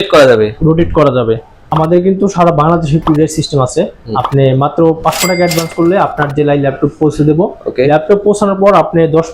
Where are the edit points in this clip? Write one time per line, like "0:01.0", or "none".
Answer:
0:01.6